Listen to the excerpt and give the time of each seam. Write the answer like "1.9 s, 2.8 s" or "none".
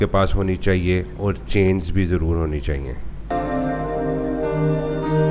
none